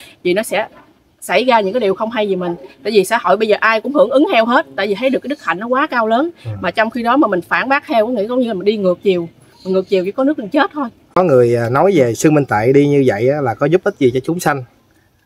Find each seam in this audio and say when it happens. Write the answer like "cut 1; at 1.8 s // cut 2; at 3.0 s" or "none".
cut 1; at 11.0 s